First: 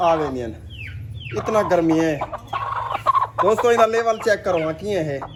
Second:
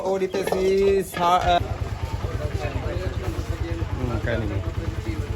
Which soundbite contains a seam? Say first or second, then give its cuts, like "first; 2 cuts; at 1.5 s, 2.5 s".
second; 1 cut; at 1.6 s